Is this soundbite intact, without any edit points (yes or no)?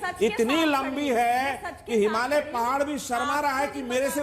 yes